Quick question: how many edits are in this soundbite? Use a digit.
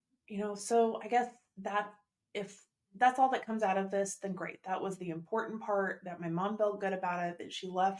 0